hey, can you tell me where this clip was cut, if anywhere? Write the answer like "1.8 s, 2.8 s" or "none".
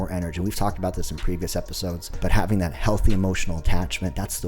2.1 s